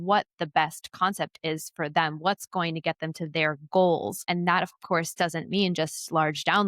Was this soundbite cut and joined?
yes; 1 cut; at 4.2 s

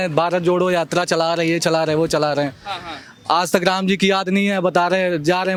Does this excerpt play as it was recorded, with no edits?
yes; 0 cuts

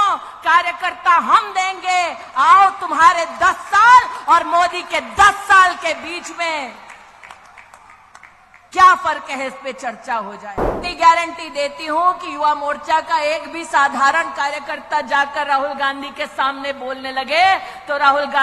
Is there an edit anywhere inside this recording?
yes; 1 cut; at 10.8 s

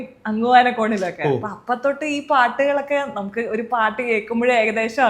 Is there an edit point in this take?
no; 0 cuts

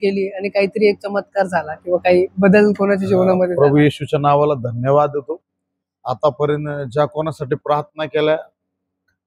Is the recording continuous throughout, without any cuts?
yes; 0 cuts

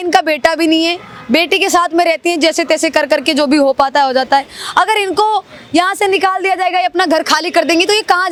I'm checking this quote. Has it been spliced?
no; 0 cuts

